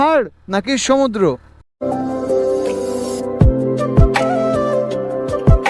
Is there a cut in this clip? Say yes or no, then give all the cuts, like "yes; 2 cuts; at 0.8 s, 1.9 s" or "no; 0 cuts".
no; 0 cuts